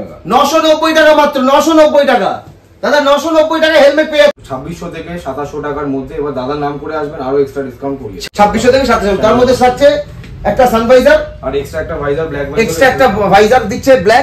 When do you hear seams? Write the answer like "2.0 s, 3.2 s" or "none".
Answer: 4.4 s, 8.2 s